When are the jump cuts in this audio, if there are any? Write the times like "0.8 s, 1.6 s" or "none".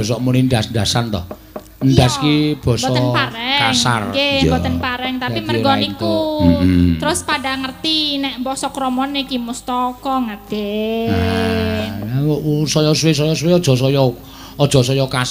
none